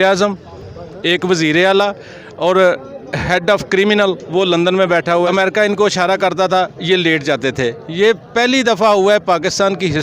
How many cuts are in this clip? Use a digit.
1